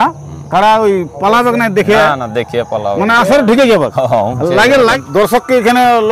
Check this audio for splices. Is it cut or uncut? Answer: cut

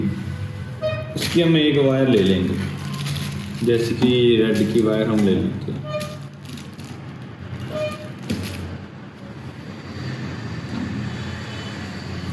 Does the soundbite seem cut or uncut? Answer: uncut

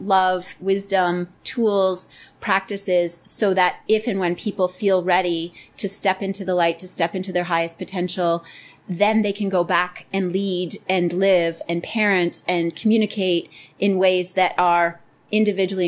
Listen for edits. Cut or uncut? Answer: uncut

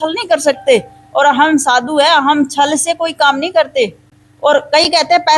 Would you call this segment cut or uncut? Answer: uncut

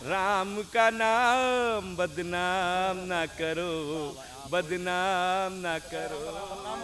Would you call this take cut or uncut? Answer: uncut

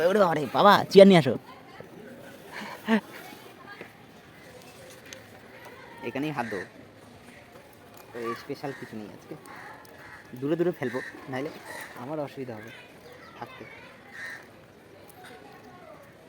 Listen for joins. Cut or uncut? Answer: cut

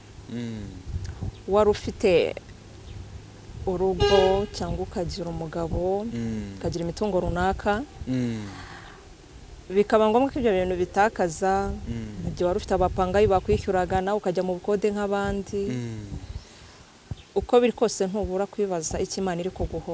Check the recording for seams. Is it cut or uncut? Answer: uncut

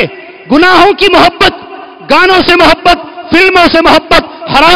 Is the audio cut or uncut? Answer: uncut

